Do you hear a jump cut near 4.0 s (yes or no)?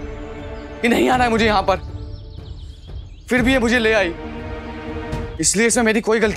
no